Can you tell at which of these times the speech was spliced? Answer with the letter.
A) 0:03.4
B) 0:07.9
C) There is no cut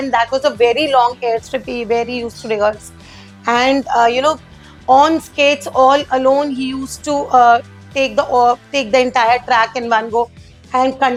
C